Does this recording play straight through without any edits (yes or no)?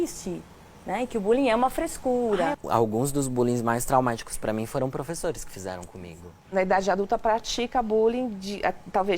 no